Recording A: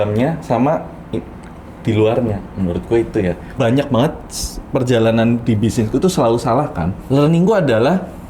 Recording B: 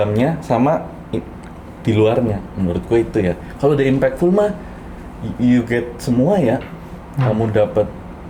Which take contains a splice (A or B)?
A